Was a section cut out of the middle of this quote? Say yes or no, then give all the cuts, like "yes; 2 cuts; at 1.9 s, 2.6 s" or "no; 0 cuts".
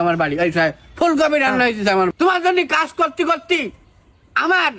yes; 1 cut; at 2.1 s